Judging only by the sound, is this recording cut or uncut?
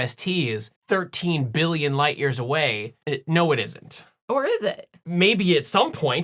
cut